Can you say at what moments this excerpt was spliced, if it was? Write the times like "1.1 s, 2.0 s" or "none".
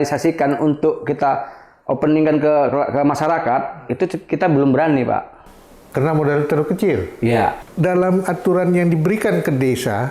7.7 s